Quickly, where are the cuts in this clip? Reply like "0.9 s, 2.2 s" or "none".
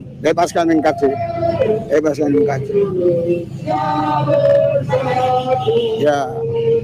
none